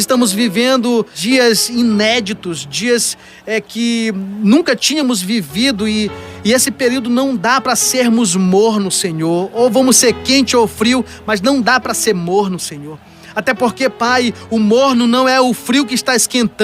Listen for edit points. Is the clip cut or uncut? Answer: cut